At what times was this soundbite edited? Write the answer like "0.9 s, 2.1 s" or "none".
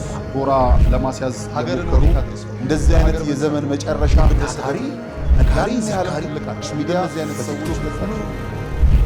none